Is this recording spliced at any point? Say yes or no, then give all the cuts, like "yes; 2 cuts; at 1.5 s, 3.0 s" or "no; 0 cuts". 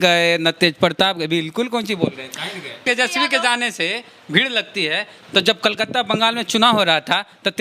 yes; 1 cut; at 2.8 s